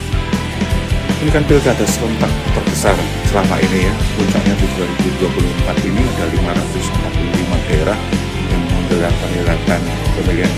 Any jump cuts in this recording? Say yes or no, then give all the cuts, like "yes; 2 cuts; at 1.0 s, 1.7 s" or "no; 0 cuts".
no; 0 cuts